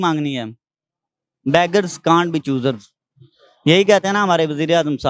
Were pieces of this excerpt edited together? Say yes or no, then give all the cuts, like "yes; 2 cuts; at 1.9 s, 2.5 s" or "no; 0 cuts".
no; 0 cuts